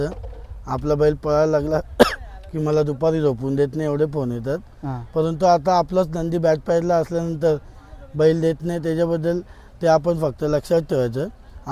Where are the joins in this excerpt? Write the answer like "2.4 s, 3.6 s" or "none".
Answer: none